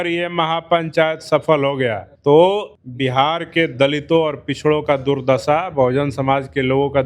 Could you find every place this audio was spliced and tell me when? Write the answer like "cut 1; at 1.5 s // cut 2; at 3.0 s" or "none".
cut 1; at 2.1 s // cut 2; at 2.8 s